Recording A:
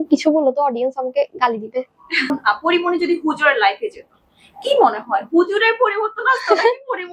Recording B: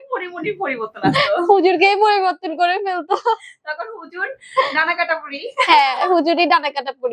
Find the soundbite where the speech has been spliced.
A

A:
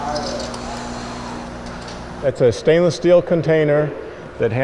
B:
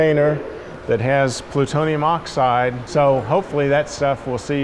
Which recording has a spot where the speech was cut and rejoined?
B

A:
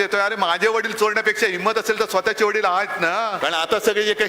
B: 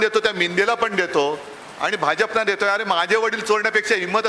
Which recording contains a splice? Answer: A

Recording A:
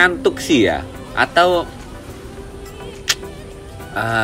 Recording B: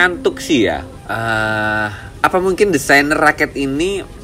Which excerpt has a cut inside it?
B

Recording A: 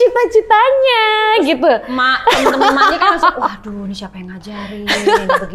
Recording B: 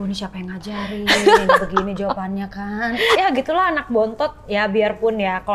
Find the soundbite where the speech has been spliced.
B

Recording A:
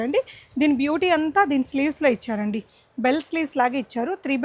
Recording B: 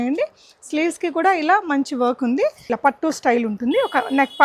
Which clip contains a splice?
B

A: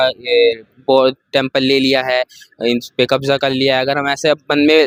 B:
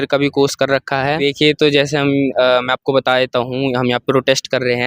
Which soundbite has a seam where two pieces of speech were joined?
B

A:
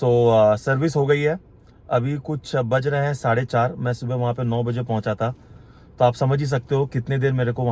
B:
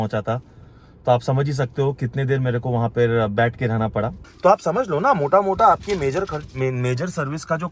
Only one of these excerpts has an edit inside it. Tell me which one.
B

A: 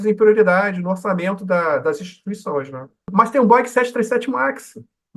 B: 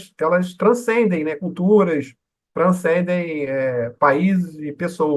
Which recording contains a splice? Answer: A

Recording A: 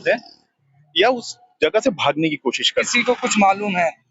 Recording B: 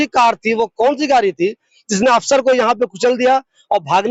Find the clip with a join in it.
A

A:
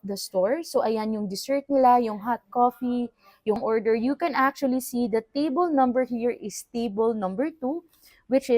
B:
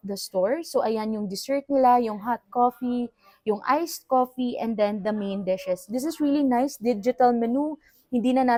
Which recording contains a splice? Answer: A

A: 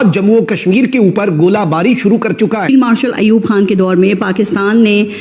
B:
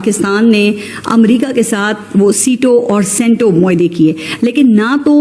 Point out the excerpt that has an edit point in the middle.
A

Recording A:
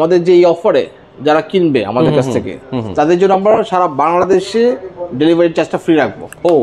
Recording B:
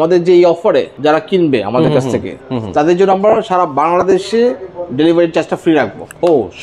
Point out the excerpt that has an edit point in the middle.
B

